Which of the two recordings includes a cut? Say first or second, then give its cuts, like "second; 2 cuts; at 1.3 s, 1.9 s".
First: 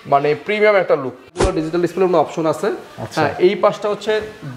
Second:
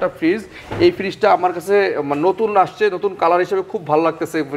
first; 1 cut; at 1.5 s